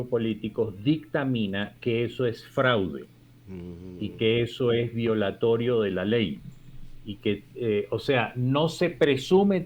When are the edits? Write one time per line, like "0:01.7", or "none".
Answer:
none

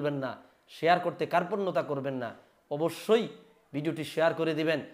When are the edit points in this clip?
none

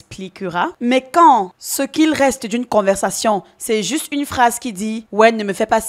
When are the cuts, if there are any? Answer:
none

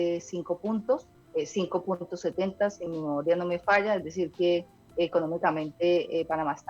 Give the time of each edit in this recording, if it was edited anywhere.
0:01.2
0:02.8
0:04.8

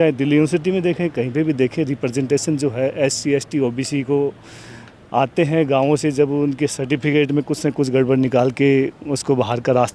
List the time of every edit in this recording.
none

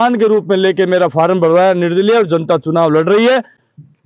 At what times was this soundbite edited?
none

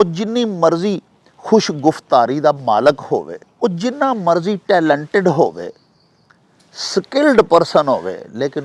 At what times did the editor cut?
0:03.4

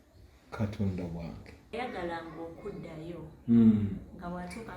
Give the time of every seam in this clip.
0:01.7

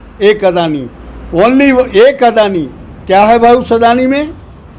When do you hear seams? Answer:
none

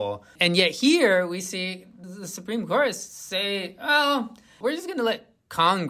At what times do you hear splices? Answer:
0:04.6

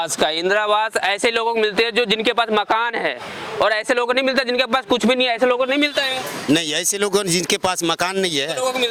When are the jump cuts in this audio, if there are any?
none

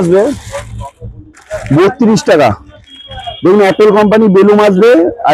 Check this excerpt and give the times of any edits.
none

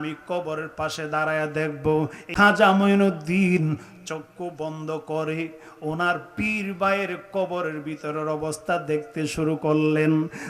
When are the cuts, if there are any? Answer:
0:02.3

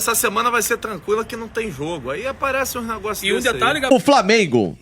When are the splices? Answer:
0:03.9

